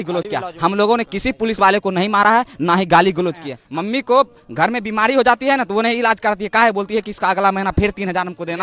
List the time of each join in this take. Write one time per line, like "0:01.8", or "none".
0:03.6